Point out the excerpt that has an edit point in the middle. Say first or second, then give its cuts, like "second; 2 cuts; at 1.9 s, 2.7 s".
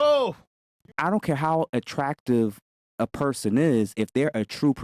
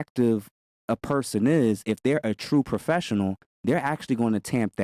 first; 1 cut; at 0.9 s